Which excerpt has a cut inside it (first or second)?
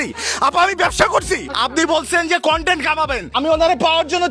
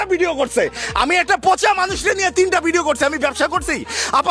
first